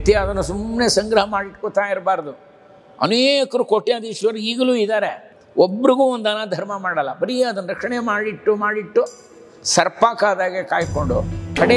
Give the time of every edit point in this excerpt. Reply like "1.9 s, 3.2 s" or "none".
5.2 s